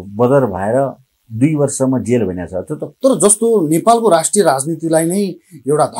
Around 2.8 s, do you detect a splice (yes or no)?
yes